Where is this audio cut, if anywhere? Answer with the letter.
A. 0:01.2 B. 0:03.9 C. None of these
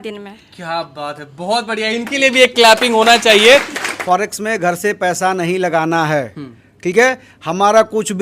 B